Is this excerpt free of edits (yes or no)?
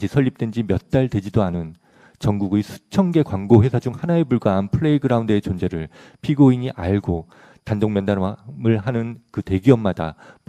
yes